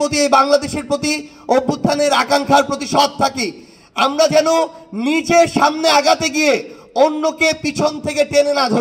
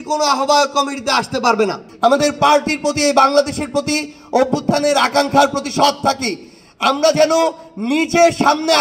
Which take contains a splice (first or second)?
second